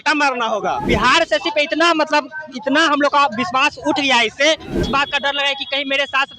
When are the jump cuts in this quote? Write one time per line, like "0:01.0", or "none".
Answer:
0:00.8
0:04.8